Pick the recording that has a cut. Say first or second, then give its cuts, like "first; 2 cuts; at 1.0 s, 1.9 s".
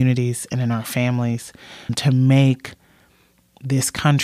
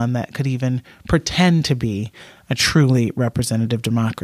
first; 1 cut; at 2.0 s